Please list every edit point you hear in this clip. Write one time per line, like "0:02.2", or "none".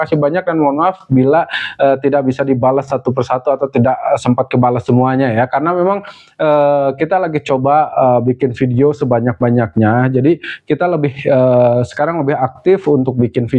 none